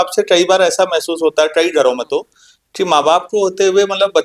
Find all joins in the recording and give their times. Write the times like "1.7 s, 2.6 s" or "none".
none